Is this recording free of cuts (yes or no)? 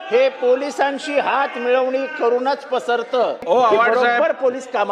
no